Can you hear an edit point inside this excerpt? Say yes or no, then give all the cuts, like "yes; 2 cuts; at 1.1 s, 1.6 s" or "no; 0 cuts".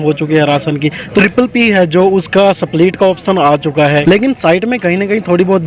yes; 2 cuts; at 1.2 s, 4.0 s